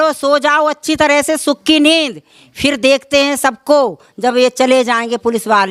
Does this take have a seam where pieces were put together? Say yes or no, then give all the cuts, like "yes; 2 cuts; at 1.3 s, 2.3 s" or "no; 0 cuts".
no; 0 cuts